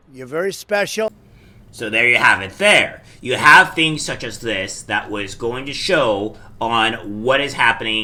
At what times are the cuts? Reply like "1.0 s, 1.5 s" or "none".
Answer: none